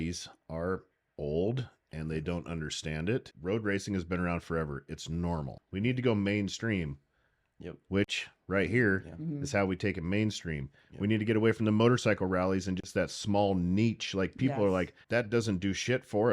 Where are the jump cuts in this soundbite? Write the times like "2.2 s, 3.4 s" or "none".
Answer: 3.3 s, 5.6 s, 15.0 s